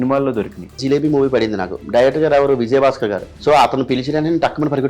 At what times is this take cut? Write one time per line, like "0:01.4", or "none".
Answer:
0:00.8
0:03.3